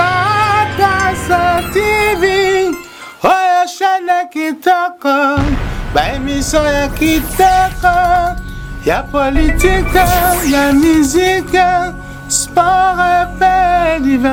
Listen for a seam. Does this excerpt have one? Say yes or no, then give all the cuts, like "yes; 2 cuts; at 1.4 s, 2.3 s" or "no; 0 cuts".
no; 0 cuts